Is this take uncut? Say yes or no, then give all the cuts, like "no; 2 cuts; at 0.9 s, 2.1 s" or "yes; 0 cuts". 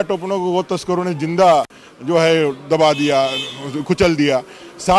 yes; 0 cuts